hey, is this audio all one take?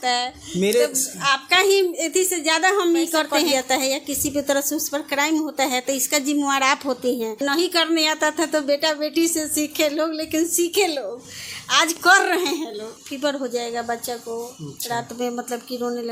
no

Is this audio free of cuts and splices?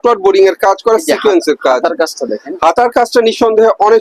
yes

